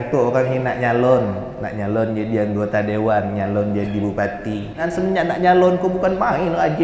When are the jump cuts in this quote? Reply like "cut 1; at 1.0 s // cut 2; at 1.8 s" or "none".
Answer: cut 1; at 4.8 s